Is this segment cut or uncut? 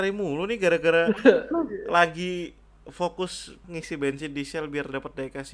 cut